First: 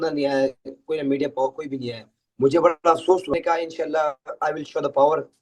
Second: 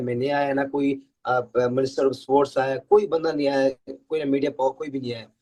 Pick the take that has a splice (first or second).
first